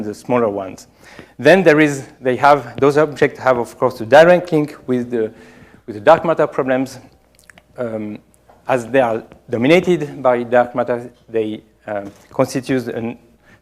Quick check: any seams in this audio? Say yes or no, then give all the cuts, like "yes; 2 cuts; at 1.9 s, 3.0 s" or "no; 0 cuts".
yes; 1 cut; at 2.1 s